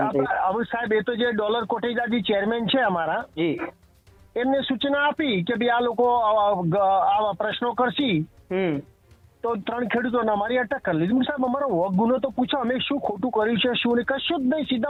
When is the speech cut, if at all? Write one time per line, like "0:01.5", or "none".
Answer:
none